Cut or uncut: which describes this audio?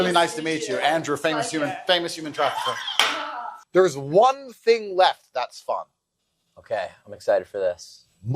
cut